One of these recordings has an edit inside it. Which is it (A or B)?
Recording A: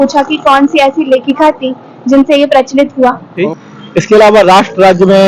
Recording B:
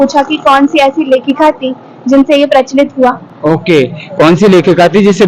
A